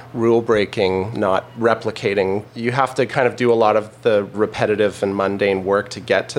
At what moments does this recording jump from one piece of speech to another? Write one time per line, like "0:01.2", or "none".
0:01.2
0:02.6
0:04.3